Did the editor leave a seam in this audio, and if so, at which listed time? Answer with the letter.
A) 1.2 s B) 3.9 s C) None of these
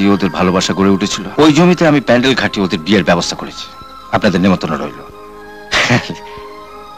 A